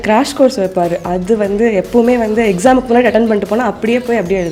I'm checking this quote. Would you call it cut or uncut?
uncut